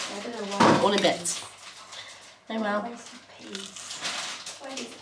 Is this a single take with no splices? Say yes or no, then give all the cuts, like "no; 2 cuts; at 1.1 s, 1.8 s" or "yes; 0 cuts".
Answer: yes; 0 cuts